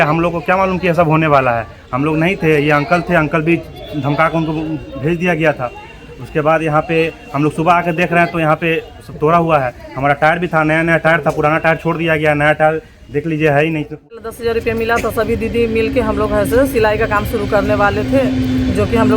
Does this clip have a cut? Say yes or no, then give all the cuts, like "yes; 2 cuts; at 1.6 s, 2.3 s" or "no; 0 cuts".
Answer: yes; 1 cut; at 14.2 s